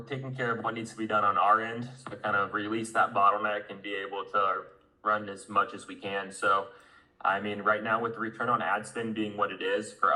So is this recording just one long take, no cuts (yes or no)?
yes